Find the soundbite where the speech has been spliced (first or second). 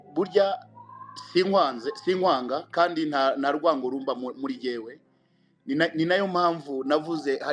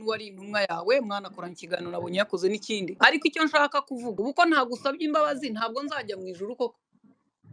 second